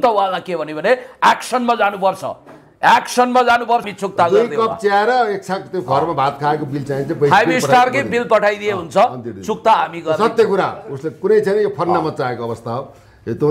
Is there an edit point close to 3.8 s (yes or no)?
yes